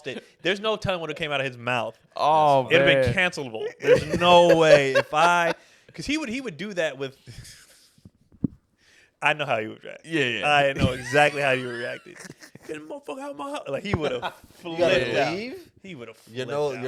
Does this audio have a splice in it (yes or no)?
no